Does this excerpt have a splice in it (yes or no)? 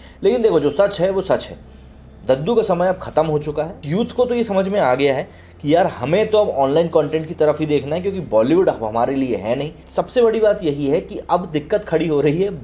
yes